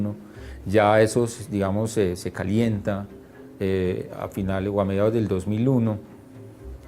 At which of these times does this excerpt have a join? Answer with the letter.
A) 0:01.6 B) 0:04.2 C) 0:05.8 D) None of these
B